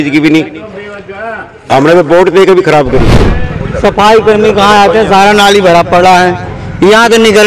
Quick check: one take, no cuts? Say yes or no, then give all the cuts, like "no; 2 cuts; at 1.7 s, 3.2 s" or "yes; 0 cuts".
no; 1 cut; at 3.2 s